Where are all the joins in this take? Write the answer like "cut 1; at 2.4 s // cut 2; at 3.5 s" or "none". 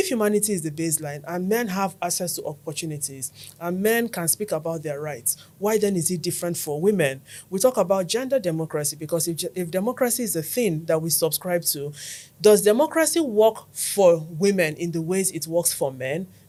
none